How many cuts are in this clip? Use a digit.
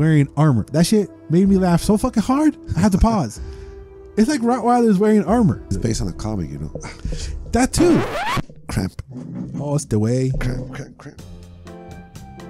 1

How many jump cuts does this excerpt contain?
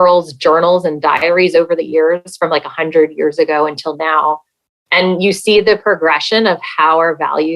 1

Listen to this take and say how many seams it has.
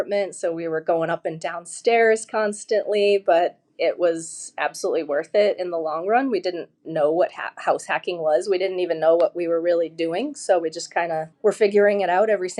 1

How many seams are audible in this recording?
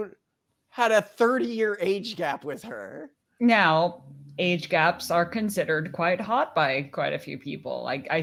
0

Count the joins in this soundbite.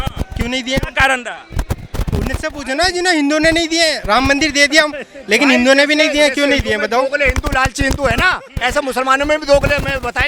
0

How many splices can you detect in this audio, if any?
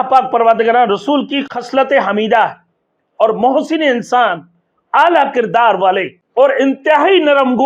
2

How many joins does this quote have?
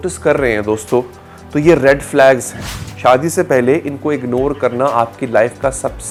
0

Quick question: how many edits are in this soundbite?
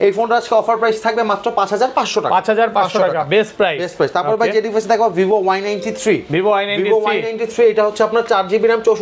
0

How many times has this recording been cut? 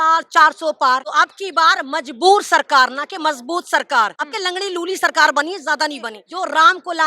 3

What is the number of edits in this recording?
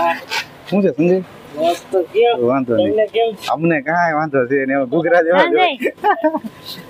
0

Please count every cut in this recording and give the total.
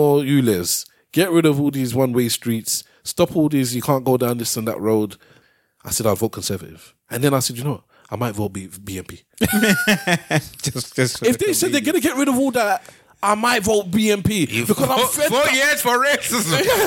1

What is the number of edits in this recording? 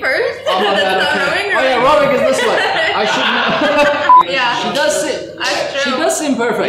1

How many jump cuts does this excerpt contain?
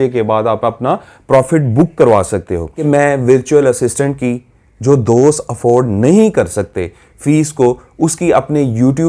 1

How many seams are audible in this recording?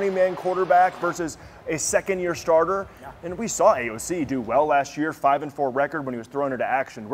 0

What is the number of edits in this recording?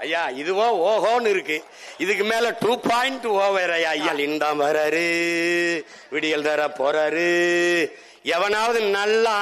1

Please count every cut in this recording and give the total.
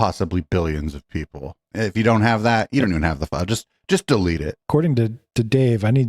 2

